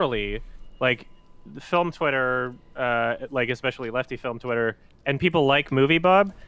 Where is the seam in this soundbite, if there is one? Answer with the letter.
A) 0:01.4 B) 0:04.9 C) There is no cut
C